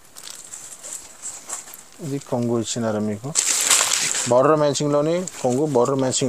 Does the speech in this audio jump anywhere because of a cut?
no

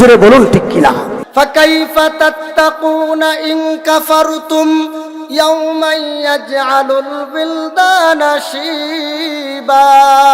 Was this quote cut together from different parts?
yes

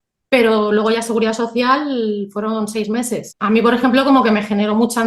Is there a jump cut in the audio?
yes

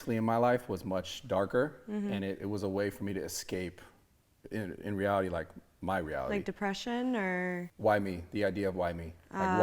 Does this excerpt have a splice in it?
yes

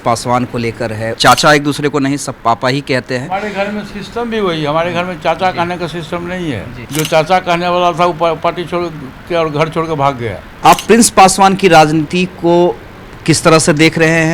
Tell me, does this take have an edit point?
yes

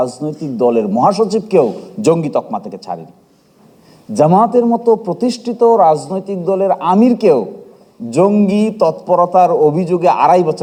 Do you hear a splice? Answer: no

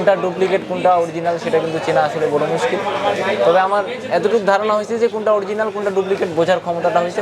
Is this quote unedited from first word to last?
yes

